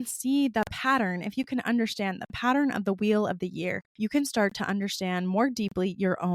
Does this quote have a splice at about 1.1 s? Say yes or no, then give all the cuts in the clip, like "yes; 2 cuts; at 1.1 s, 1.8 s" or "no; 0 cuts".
no; 1 cut; at 3.8 s